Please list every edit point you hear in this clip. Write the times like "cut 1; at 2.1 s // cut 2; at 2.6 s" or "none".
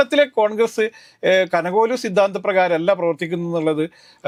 none